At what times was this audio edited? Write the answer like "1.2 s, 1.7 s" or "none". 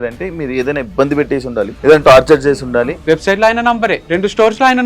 1.7 s, 2.9 s, 4.0 s